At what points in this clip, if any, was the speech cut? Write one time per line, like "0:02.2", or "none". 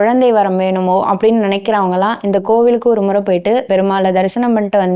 0:03.7